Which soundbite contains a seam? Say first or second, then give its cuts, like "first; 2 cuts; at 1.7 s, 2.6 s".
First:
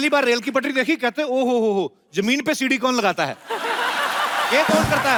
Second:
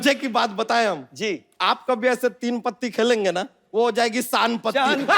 second; 2 cuts; at 1.1 s, 3.6 s